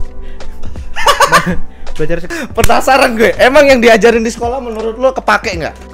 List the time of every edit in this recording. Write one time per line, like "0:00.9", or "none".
0:02.3